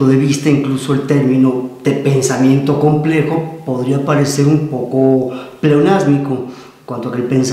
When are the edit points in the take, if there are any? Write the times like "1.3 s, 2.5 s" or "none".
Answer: 1.7 s

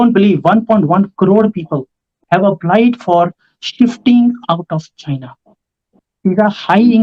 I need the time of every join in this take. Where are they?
2.2 s, 5.9 s

